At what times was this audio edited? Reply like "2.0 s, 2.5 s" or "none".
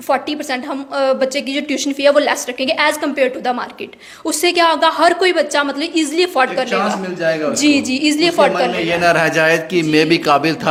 none